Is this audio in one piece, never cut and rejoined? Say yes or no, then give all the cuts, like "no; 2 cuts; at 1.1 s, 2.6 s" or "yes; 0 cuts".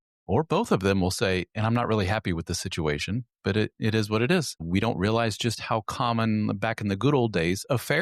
yes; 0 cuts